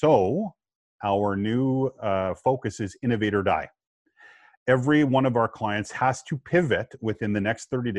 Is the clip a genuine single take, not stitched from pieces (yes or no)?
yes